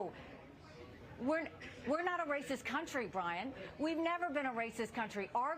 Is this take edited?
yes; 1 cut; at 2.6 s

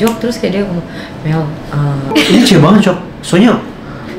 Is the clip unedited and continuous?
no; 1 cut; at 2.1 s

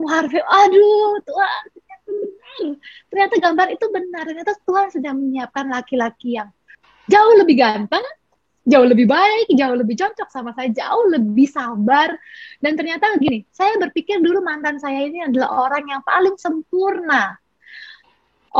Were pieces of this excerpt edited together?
yes; 1 cut; at 6.8 s

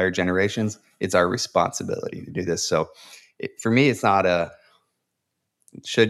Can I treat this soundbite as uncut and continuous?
yes; 0 cuts

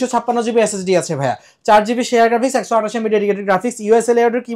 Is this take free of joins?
yes; 0 cuts

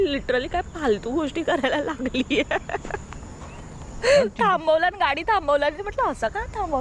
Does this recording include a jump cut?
no; 0 cuts

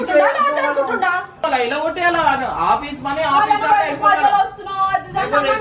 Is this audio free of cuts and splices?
no; 1 cut; at 1.4 s

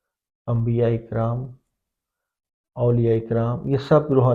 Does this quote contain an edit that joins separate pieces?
no; 0 cuts

